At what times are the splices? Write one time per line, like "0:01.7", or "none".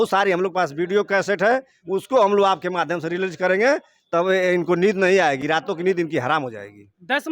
none